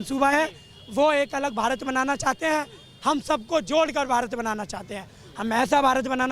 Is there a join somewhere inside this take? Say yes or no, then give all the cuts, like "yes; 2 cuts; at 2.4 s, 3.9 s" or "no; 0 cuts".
no; 0 cuts